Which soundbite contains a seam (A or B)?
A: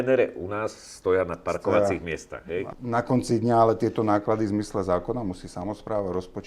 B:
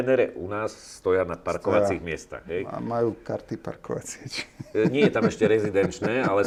A